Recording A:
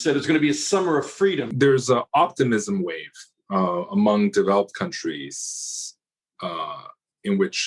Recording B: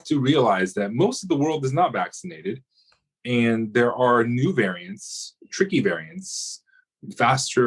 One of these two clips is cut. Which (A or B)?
A